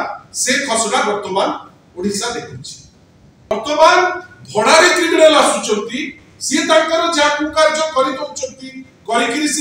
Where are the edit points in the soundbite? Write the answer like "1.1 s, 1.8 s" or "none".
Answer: 3.5 s